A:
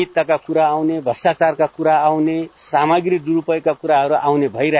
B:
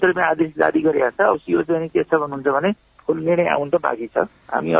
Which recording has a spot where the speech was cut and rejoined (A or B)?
A